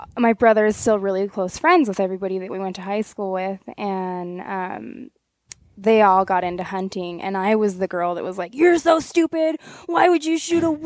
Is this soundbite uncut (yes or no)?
yes